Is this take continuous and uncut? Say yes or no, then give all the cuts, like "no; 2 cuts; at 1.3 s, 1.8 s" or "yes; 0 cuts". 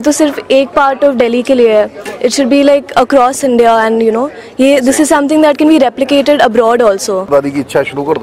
no; 1 cut; at 7.3 s